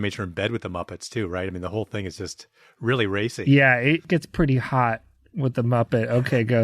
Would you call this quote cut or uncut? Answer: cut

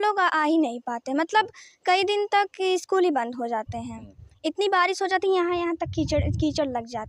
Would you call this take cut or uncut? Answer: uncut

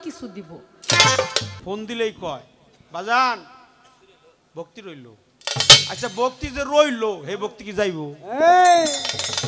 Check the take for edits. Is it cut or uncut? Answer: cut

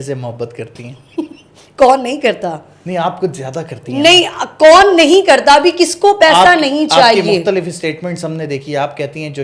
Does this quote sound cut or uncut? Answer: uncut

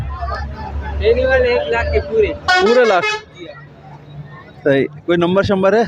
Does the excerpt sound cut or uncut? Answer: uncut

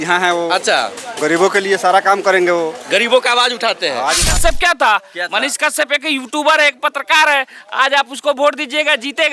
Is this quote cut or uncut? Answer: cut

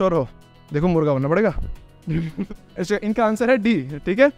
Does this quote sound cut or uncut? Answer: cut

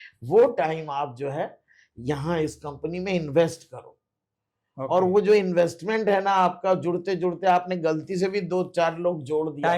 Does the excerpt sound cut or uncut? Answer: uncut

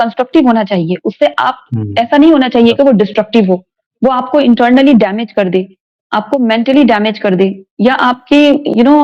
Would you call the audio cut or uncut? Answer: uncut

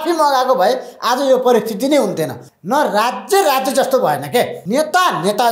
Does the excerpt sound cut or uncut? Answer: cut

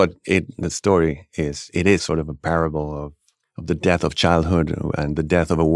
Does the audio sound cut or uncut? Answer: cut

